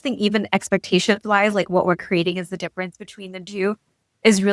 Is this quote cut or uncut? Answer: uncut